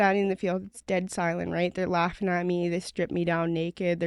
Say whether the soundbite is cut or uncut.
uncut